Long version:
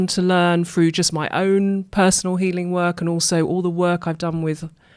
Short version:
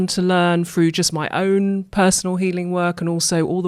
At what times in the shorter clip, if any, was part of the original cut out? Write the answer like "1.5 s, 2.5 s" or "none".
none